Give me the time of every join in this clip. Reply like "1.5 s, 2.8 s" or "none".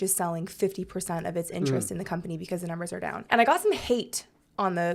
3.2 s